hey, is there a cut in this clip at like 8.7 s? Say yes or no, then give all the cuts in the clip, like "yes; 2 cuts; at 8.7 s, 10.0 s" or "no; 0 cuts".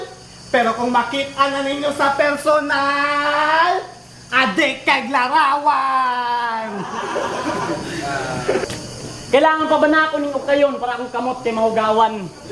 yes; 1 cut; at 8.7 s